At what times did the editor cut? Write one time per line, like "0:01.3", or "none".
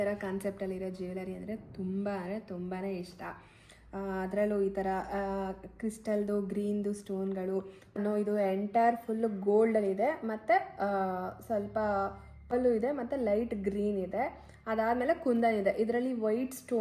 0:08.0
0:12.5